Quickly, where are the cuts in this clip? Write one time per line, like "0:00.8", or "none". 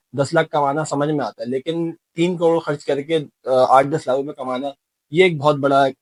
none